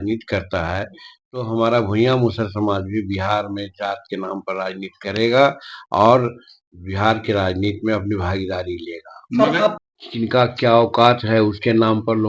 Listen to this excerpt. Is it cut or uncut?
cut